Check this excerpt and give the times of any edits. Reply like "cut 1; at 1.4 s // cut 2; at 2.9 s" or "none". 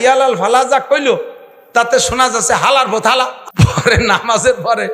cut 1; at 3.4 s